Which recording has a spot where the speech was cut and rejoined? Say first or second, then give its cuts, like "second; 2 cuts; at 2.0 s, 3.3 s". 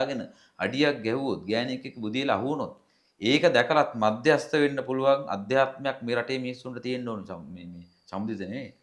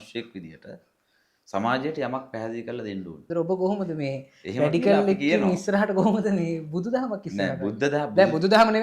second; 1 cut; at 3.1 s